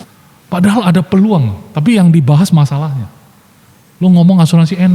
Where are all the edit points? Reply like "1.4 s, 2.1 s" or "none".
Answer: none